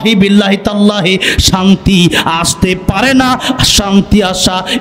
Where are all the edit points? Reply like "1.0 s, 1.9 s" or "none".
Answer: none